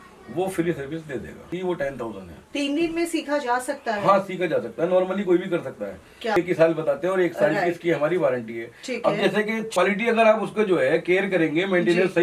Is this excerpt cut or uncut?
cut